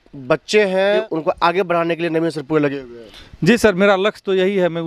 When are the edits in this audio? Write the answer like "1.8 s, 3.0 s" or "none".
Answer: 1.1 s